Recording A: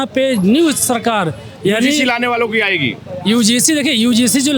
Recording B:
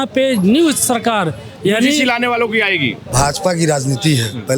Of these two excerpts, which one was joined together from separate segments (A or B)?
B